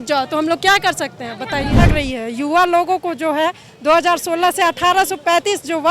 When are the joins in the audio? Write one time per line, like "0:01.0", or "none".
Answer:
0:01.7